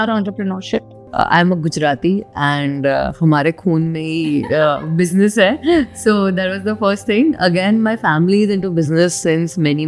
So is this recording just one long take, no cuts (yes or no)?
no